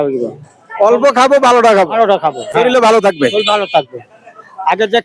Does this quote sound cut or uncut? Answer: uncut